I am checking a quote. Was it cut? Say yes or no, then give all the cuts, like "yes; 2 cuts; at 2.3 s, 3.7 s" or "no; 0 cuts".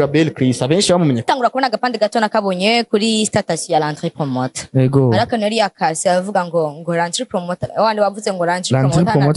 yes; 1 cut; at 1.2 s